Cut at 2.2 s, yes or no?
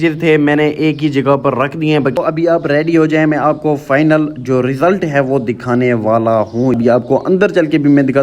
yes